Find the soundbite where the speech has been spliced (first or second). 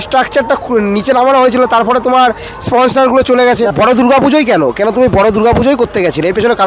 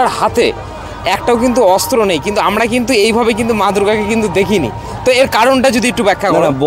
first